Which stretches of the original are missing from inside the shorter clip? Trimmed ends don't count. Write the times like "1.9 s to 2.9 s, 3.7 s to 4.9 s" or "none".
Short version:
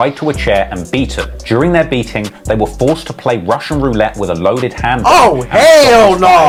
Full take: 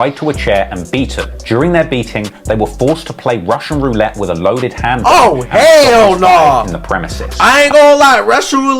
none

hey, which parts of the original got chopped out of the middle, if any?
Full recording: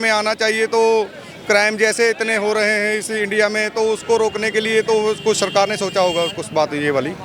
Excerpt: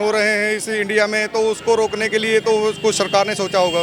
none

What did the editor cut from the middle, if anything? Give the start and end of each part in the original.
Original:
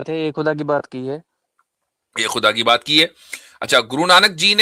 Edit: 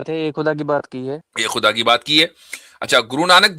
1.3 s to 2.1 s

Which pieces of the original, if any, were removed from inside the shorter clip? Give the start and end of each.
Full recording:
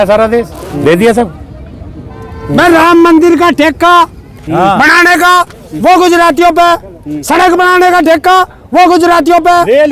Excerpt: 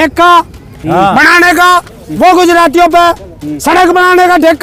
none

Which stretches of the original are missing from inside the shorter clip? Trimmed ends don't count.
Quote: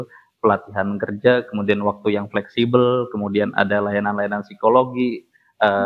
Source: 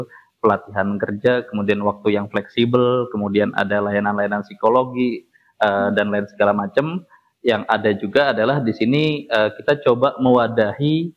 none

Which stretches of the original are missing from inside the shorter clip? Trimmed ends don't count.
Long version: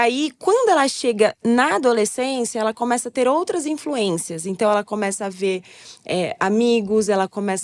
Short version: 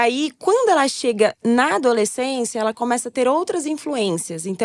none

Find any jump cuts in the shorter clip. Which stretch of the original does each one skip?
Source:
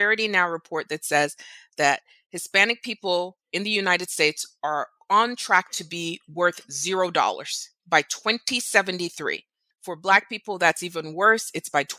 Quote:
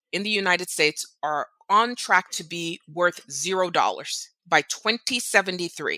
none

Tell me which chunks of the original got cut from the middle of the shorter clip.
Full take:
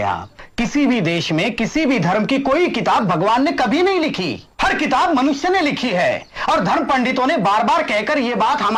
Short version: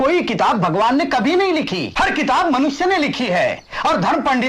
4.3 s to 4.5 s

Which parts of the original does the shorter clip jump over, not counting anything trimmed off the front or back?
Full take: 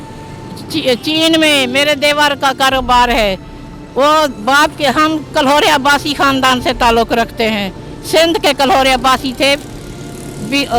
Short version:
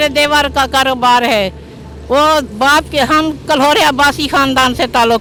none

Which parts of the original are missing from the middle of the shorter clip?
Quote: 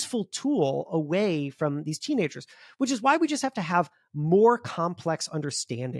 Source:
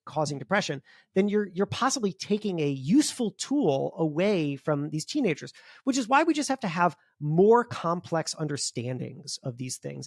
none

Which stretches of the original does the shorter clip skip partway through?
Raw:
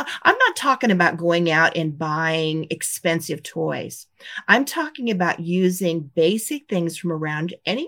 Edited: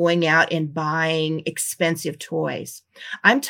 none

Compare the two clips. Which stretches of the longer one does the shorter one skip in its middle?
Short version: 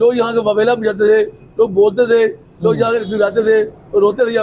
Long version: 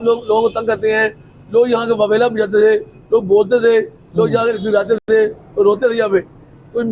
5.0 s to 5.1 s

